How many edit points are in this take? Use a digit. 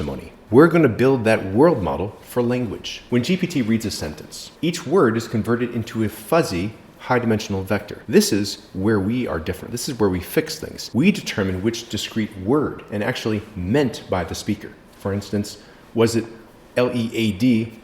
1